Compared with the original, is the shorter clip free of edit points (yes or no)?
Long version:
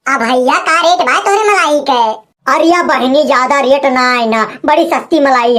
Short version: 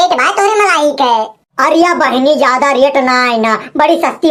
yes